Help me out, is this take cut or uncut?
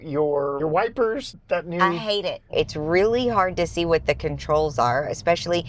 cut